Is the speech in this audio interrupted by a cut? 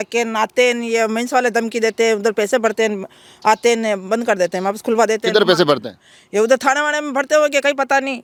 no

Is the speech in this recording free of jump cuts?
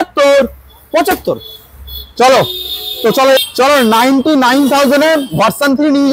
no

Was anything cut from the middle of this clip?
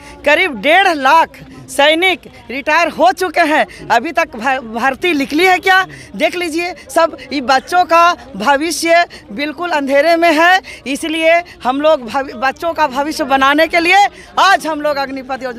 no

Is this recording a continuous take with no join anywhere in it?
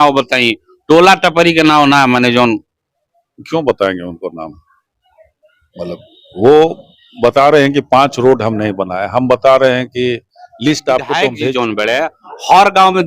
no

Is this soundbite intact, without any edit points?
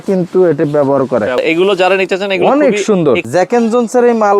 no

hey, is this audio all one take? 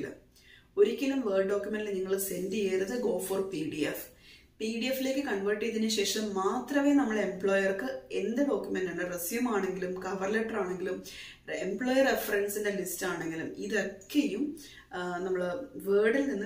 yes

